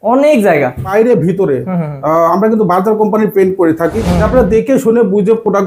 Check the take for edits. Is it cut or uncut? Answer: cut